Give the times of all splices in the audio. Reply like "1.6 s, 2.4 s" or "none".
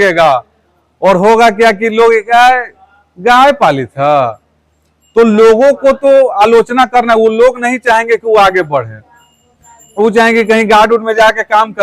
none